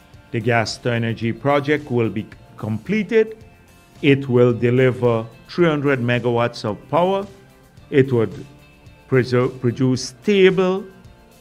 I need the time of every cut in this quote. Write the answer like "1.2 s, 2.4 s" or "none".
none